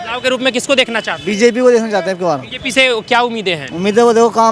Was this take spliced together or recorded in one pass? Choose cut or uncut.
cut